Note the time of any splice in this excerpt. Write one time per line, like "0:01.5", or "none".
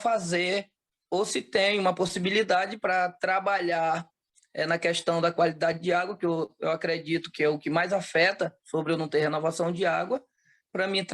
0:01.0